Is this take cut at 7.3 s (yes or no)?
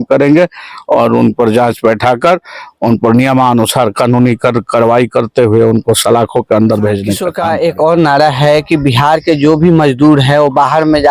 yes